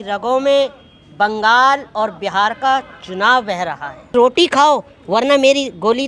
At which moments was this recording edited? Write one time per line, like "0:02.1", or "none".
0:04.1